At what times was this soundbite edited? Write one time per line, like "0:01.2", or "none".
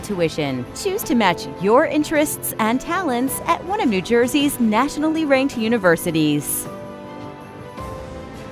0:06.4